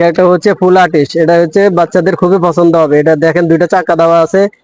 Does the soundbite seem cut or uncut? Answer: uncut